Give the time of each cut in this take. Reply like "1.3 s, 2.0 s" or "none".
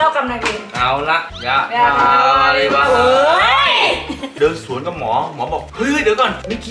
4.3 s